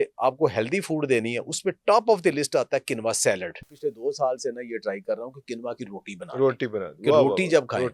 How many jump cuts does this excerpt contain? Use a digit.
1